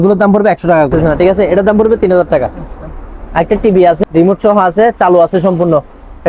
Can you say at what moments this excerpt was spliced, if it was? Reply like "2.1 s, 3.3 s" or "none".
0.9 s, 4.0 s